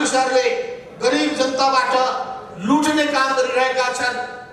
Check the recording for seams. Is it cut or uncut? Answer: uncut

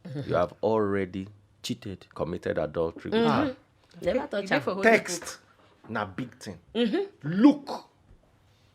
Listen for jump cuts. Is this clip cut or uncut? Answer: uncut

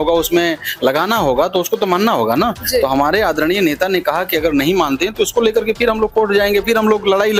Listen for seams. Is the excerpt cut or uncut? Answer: uncut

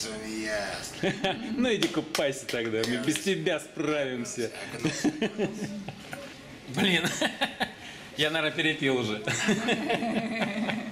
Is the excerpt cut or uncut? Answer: cut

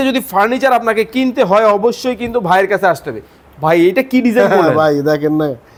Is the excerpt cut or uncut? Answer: uncut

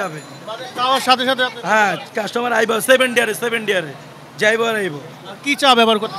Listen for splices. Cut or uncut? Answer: uncut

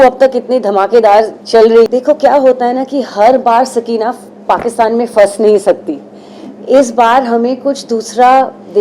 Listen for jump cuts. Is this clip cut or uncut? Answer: cut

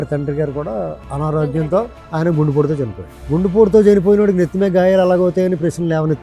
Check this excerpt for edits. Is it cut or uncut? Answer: cut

